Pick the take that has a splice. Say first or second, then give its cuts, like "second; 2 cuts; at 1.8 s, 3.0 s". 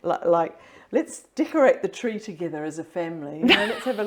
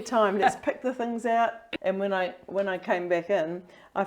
second; 1 cut; at 1.7 s